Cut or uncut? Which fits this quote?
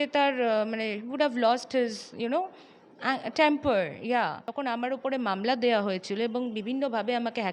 cut